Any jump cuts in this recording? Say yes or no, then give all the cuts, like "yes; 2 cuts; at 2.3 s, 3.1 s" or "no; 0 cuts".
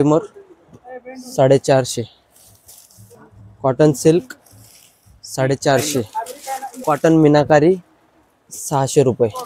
yes; 2 cuts; at 3.1 s, 6.7 s